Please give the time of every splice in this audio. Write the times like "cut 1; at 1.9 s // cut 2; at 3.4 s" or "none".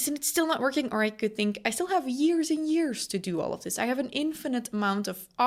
none